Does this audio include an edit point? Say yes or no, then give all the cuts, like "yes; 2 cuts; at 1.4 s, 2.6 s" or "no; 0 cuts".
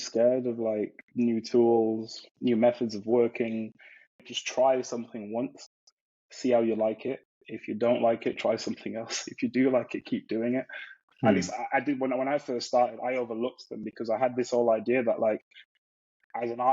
yes; 4 cuts; at 1.0 s, 2.2 s, 4.3 s, 10.9 s